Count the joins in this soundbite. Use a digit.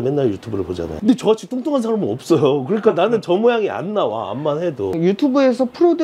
2